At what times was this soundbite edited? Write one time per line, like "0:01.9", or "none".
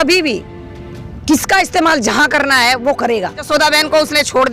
0:03.5